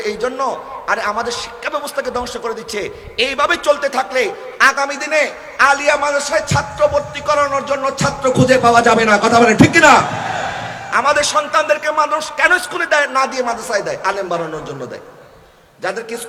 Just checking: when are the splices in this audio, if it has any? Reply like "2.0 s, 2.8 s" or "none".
none